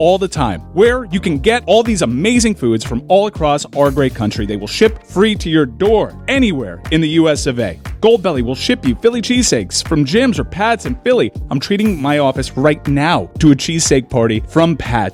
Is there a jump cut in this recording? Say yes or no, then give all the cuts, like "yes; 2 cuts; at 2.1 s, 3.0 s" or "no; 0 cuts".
no; 0 cuts